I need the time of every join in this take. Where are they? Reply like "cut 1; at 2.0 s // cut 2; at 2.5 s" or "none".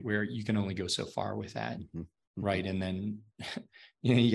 none